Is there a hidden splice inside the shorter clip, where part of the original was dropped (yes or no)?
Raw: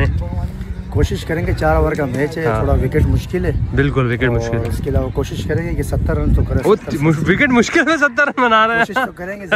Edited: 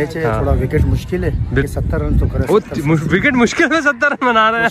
yes